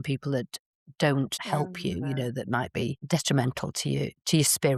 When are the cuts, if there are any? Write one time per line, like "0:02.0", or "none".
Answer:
none